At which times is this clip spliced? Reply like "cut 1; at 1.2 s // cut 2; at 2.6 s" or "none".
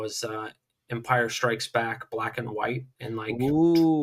none

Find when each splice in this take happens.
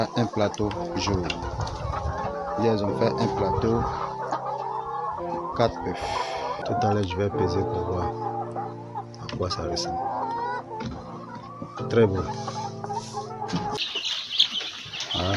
cut 1; at 13.8 s

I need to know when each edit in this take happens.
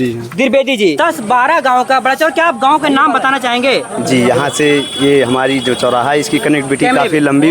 cut 1; at 1.0 s

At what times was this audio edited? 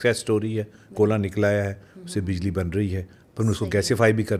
none

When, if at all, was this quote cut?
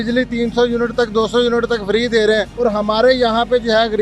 cut 1; at 2.5 s

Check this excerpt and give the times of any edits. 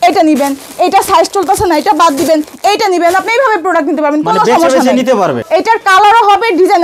cut 1; at 5.4 s

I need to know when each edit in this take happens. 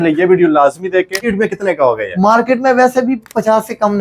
cut 1; at 1.3 s

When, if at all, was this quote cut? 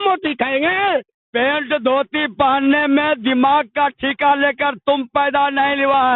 cut 1; at 1.2 s

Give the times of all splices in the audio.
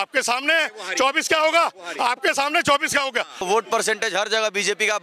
cut 1; at 3.4 s

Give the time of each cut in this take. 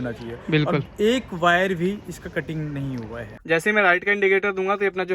cut 1; at 3.4 s

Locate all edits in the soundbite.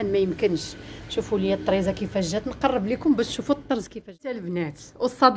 cut 1; at 4.3 s

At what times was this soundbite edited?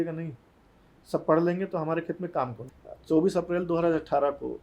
cut 1; at 2.6 s

